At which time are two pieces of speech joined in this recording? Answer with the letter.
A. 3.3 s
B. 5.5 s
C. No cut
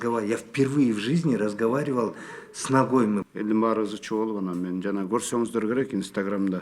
A